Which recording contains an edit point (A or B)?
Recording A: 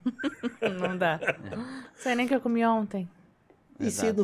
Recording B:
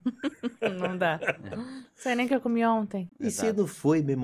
B